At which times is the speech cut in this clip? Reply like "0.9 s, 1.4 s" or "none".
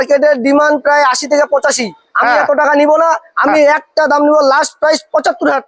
none